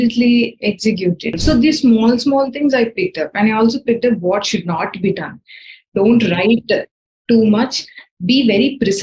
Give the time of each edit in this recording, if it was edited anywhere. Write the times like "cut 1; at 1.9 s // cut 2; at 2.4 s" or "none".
cut 1; at 1.3 s